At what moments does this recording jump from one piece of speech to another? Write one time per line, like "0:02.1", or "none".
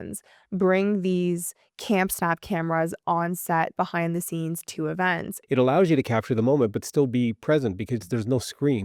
0:05.3